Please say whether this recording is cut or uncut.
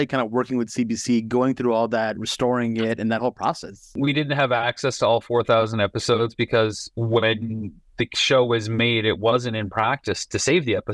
cut